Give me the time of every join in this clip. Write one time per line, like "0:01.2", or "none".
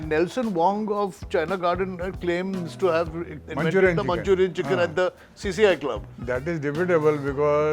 0:03.4